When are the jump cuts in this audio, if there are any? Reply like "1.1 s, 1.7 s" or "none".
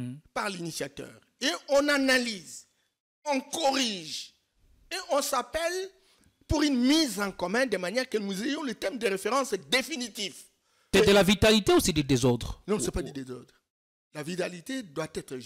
10.9 s